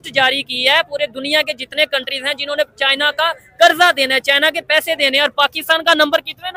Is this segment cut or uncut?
uncut